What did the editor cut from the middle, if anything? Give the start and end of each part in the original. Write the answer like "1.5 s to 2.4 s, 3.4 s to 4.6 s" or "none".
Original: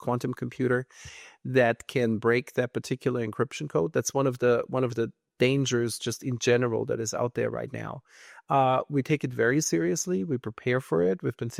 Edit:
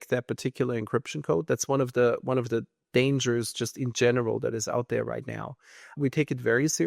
8.4 s to 8.9 s